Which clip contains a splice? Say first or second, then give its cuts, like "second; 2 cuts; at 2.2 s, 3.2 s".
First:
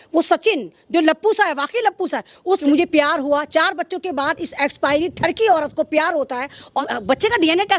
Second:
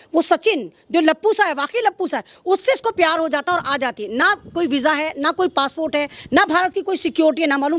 first; 2 cuts; at 2.6 s, 6.8 s